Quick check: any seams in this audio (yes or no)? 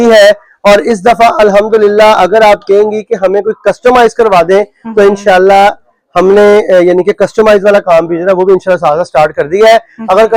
no